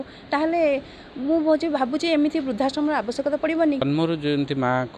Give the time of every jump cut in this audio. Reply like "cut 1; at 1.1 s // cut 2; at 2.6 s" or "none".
cut 1; at 3.8 s